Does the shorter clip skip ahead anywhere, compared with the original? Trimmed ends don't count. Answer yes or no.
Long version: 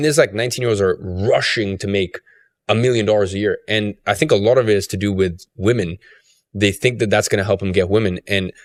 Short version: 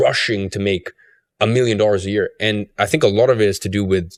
no